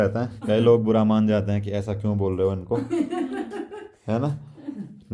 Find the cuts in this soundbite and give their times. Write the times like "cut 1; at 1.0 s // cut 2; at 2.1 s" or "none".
none